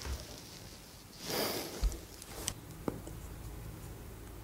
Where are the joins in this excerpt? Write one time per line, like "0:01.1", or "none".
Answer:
0:02.5